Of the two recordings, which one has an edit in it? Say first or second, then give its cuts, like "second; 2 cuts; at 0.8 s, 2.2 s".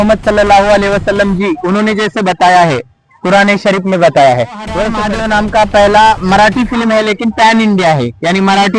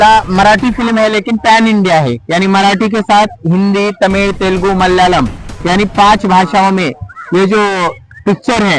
first; 1 cut; at 5.0 s